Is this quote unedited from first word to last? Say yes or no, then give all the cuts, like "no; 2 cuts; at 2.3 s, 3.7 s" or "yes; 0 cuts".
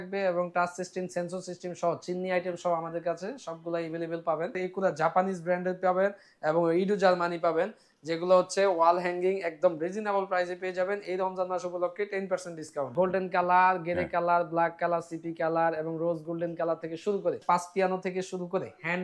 no; 3 cuts; at 4.6 s, 12.9 s, 17.4 s